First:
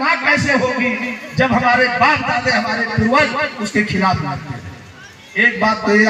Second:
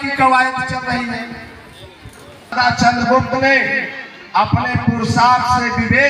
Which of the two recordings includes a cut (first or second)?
second